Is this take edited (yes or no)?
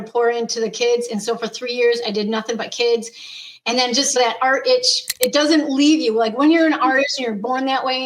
yes